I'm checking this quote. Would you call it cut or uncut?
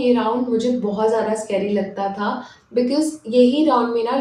uncut